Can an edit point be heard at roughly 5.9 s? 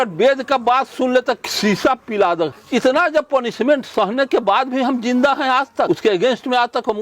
yes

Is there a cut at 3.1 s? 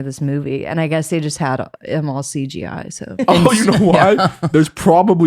yes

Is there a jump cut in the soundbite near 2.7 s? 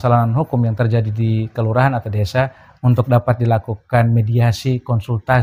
no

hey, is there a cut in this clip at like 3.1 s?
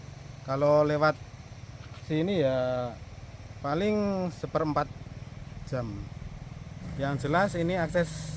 no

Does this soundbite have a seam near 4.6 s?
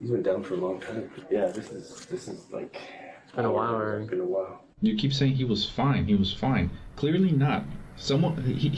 yes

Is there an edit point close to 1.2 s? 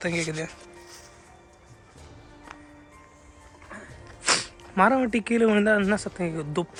no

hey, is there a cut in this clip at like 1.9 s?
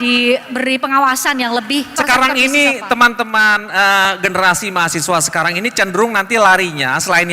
yes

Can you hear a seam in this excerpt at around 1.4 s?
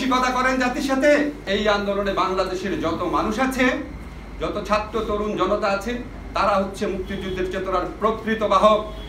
yes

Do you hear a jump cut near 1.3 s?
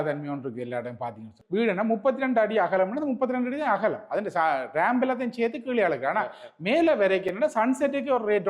yes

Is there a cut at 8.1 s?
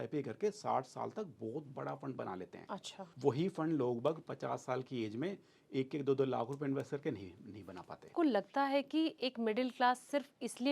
yes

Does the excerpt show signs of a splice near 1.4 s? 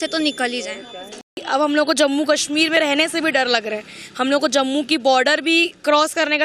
yes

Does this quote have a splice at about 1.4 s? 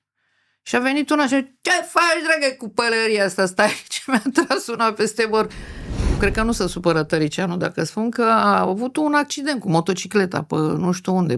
no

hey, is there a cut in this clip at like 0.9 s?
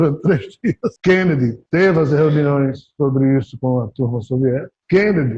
yes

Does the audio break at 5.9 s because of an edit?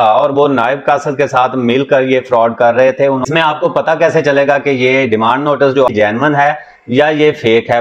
yes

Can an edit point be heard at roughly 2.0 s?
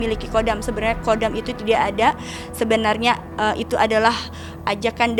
no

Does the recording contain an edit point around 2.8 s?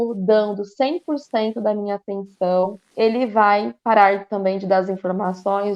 yes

